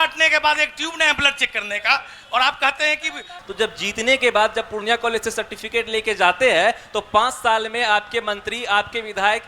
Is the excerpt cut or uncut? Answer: cut